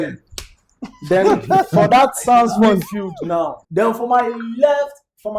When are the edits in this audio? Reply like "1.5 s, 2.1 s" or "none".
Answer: 3.6 s

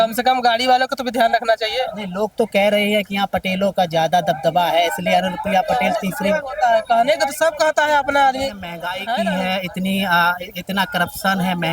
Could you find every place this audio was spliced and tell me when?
9.1 s

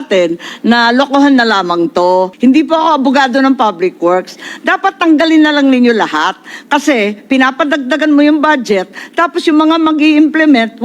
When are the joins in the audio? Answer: 2.3 s

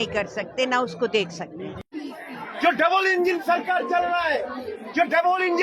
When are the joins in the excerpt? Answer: none

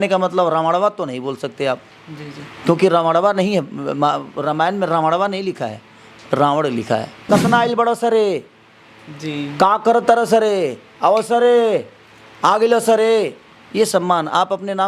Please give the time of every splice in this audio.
7.1 s

